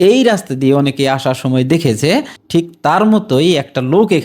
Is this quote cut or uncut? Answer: uncut